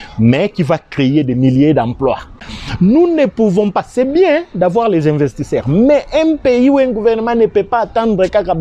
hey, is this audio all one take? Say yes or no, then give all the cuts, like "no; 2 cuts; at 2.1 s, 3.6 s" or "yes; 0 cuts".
no; 1 cut; at 2.6 s